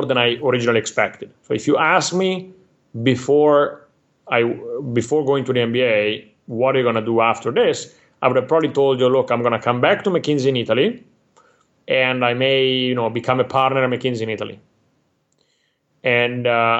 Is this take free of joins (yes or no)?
yes